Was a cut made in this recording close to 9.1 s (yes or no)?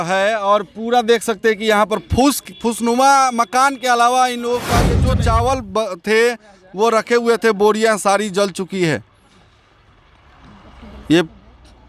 no